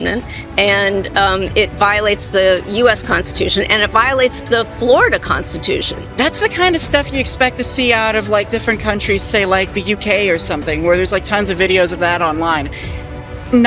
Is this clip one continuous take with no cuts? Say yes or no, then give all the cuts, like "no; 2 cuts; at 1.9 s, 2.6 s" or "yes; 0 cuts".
no; 1 cut; at 6.0 s